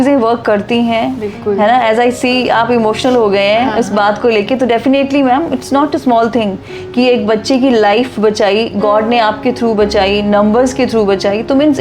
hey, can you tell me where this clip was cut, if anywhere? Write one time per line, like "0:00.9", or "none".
none